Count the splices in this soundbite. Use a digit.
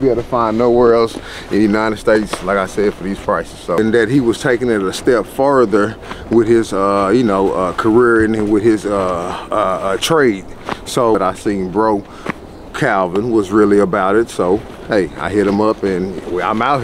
2